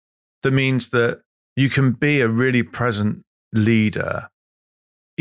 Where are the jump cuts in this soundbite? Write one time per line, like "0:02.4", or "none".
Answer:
none